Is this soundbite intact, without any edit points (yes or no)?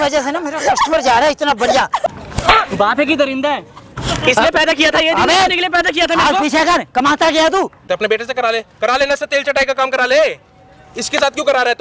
no